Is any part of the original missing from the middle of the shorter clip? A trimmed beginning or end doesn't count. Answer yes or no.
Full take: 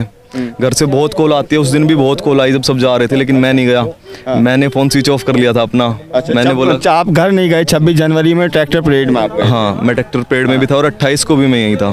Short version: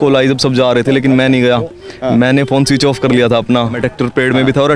yes